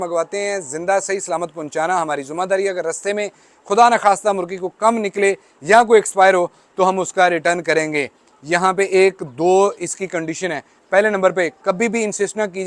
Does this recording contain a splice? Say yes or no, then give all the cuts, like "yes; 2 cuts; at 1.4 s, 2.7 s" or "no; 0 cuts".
no; 0 cuts